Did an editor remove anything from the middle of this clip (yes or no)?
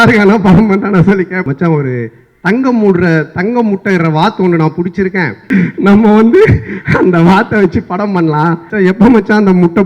yes